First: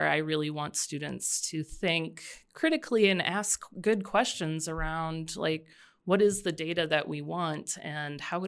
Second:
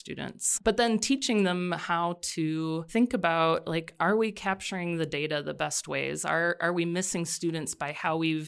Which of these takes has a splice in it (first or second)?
second